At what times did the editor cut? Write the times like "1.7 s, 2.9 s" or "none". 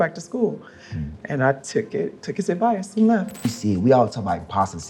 3.5 s